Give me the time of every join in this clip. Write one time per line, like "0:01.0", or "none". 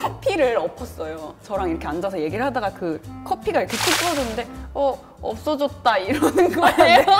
none